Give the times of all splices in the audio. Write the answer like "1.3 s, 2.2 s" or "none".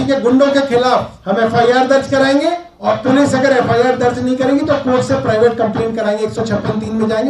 1.2 s, 2.7 s